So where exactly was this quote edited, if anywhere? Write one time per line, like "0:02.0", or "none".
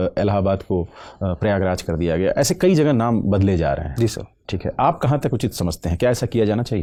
none